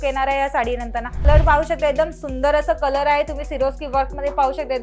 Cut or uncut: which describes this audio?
cut